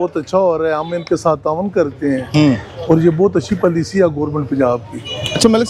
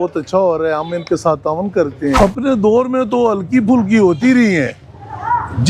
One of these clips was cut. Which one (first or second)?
second